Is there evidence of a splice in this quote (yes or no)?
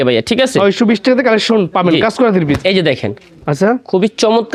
no